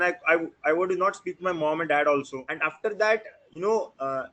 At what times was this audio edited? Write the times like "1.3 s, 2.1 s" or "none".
2.4 s